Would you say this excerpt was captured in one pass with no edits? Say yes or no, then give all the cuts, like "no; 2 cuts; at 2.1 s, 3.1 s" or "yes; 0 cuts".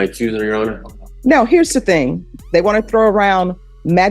no; 1 cut; at 2.3 s